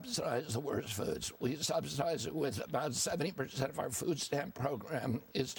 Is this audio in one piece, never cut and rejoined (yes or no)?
yes